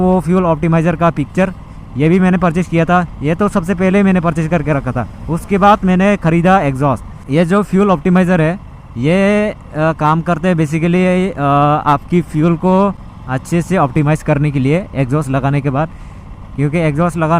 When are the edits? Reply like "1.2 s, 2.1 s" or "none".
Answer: none